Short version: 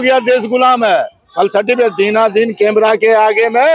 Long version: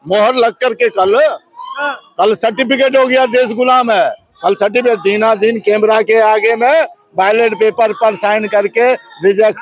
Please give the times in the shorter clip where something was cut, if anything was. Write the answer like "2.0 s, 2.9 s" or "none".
none